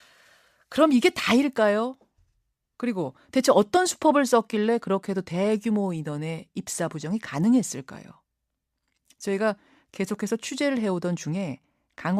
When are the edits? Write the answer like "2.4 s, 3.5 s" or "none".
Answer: 3.8 s